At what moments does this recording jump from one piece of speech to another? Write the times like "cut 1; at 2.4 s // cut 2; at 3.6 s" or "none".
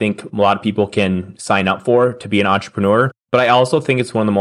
cut 1; at 3.2 s